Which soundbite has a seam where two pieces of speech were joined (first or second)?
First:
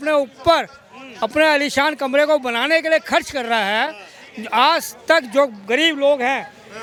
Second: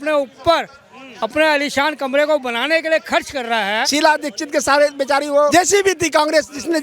second